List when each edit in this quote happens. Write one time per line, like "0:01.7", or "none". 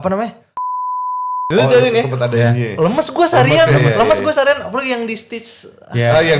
none